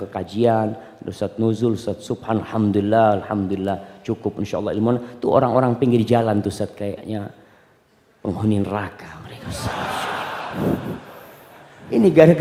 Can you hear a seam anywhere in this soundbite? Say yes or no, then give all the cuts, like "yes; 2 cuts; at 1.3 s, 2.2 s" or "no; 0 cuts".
no; 0 cuts